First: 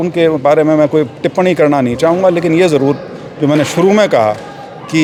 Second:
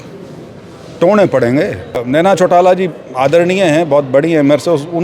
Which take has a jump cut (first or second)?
second